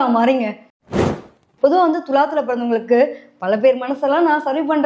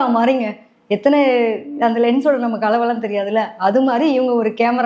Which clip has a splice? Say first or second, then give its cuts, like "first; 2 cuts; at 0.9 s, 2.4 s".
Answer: first; 1 cut; at 1.0 s